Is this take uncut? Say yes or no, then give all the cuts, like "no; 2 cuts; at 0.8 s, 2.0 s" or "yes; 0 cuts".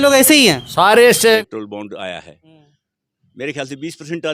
no; 1 cut; at 1.2 s